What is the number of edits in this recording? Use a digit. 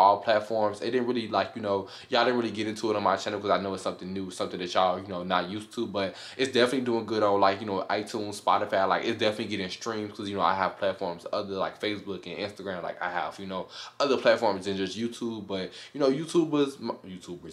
0